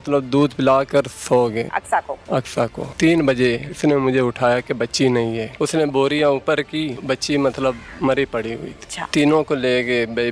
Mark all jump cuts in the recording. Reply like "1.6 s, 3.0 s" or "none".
1.7 s, 2.8 s, 3.7 s, 5.5 s, 7.0 s, 7.9 s, 9.0 s